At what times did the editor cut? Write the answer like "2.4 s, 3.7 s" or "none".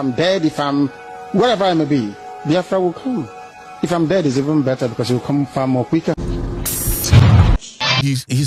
none